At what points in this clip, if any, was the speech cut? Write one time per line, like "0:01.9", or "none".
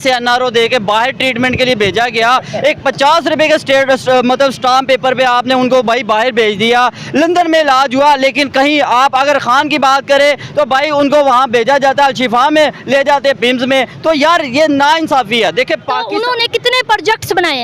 0:16.0